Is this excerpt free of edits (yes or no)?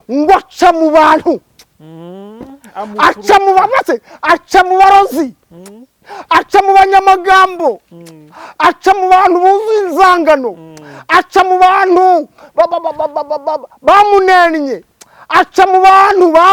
yes